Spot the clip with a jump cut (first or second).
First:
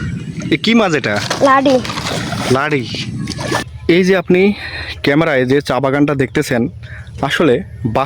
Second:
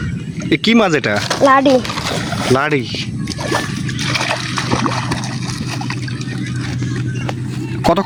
first